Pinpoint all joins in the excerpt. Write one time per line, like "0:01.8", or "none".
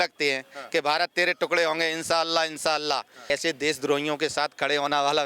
0:03.3